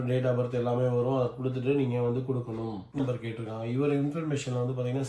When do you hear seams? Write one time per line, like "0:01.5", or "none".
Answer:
0:03.0